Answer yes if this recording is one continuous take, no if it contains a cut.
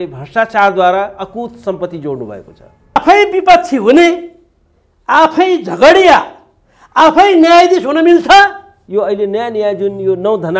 no